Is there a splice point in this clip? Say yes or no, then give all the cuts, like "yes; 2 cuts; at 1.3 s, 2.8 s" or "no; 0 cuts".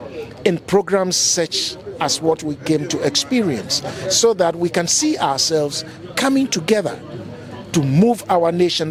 no; 0 cuts